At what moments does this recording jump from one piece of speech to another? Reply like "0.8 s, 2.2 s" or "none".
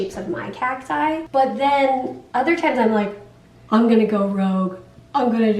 1.3 s